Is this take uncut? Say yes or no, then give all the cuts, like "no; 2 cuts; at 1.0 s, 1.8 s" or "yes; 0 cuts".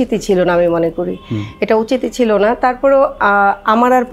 yes; 0 cuts